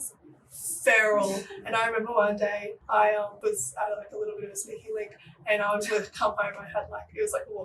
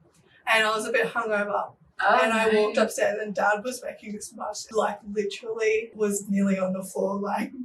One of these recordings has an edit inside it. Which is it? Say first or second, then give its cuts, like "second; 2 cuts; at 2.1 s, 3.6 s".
first; 1 cut; at 2.7 s